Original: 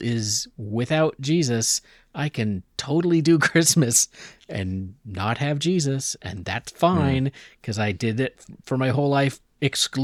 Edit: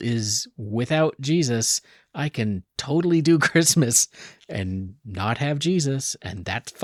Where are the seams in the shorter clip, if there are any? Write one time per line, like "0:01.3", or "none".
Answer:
none